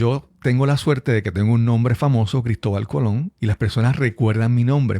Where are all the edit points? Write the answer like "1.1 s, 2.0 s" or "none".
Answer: 3.3 s